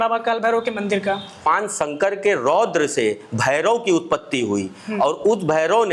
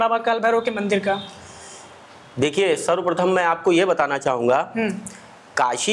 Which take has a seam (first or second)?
first